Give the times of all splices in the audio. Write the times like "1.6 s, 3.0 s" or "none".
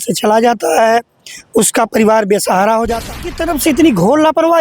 3.2 s